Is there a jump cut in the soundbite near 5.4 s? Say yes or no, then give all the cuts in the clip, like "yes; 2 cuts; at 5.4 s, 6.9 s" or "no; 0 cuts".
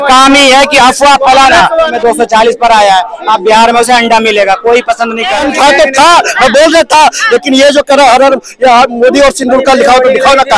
yes; 2 cuts; at 1.9 s, 5.4 s